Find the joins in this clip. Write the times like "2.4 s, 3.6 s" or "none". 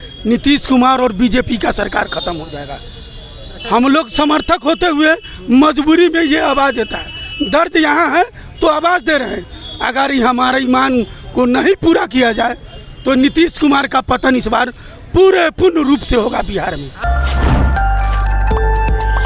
none